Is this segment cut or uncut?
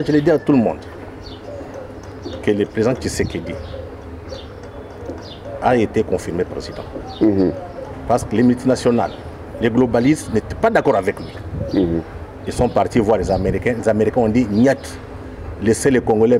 uncut